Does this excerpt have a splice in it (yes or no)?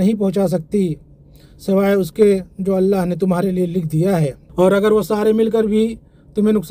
no